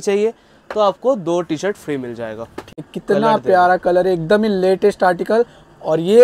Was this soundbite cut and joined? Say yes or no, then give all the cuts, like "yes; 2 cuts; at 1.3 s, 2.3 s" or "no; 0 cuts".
yes; 1 cut; at 2.7 s